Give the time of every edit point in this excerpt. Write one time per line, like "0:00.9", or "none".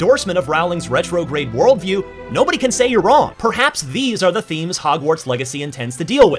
0:03.3